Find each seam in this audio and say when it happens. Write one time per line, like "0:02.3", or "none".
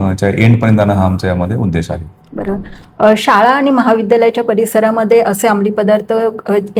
none